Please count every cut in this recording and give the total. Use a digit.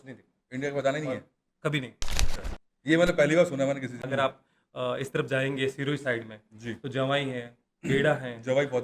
1